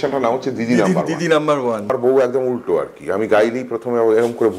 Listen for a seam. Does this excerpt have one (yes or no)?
yes